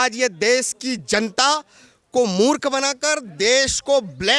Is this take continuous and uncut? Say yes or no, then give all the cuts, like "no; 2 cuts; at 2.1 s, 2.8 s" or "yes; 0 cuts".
yes; 0 cuts